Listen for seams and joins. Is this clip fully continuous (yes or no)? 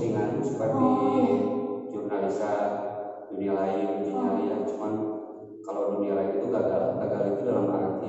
yes